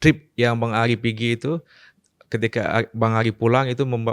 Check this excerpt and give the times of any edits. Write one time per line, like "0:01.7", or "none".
none